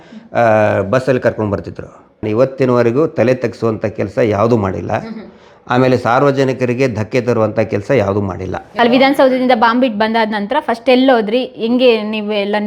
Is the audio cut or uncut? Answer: cut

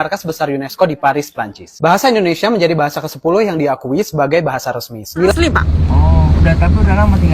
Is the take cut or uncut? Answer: cut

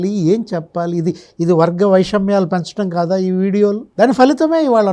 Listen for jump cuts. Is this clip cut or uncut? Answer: cut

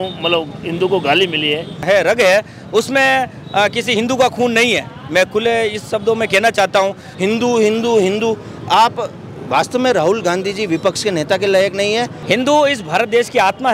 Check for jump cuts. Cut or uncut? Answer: cut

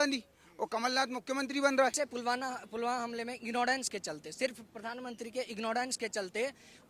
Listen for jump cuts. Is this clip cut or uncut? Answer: cut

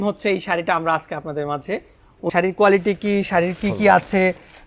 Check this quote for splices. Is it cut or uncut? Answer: cut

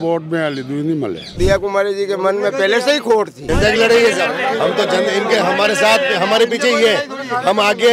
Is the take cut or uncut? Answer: cut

